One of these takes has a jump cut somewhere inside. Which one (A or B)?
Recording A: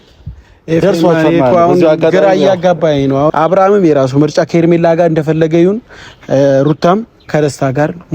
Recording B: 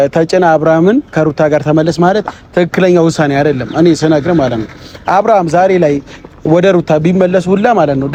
A